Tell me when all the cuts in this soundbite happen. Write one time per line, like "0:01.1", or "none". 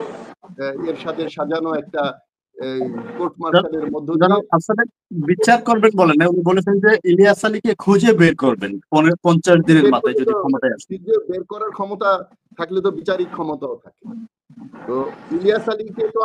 none